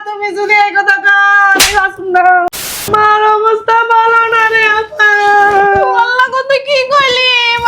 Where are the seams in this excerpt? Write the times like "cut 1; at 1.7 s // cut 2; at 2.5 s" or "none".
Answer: cut 1; at 2.8 s